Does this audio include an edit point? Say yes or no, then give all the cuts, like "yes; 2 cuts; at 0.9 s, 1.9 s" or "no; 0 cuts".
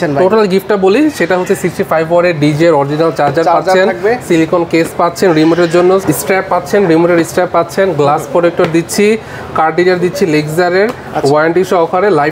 no; 0 cuts